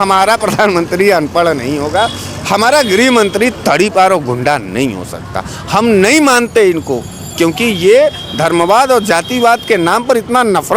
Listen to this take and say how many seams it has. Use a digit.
0